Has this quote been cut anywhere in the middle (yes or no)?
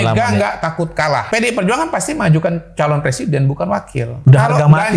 yes